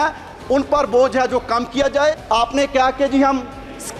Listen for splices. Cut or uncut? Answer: cut